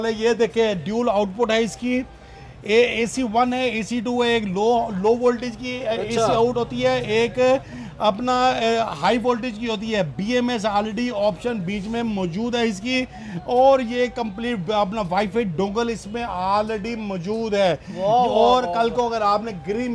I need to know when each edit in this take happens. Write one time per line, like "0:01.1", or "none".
none